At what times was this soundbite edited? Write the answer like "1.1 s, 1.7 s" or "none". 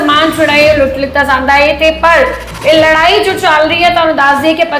none